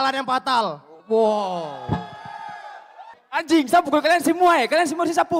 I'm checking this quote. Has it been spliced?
yes; 1 cut; at 3.2 s

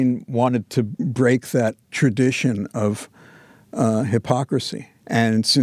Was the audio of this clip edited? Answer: no; 0 cuts

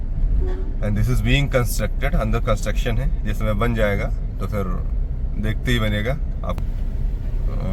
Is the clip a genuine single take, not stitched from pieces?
no; 1 cut; at 6.6 s

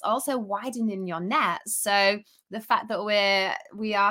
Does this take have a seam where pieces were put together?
no; 0 cuts

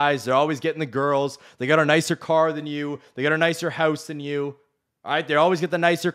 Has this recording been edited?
no; 0 cuts

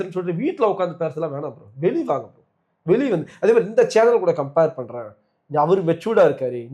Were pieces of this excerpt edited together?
no; 0 cuts

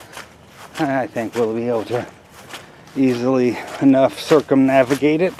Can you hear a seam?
no; 0 cuts

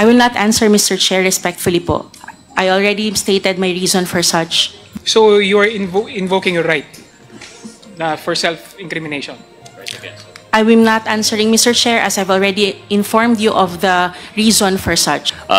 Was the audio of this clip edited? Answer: no; 0 cuts

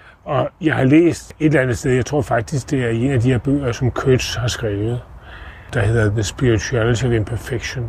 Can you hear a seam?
yes; 2 cuts; at 1.3 s, 5.6 s

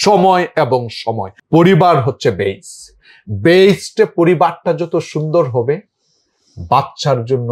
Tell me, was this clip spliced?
yes; 1 cut; at 1.3 s

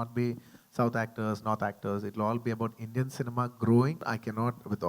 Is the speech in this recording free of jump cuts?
no; 1 cut; at 4.0 s

